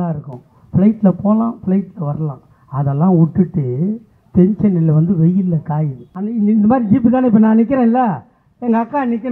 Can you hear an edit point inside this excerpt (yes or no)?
yes